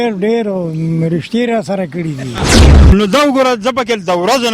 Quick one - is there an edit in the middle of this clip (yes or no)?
yes